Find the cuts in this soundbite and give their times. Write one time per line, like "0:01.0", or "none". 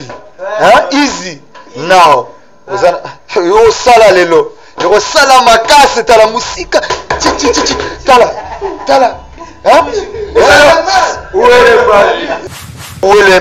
0:12.4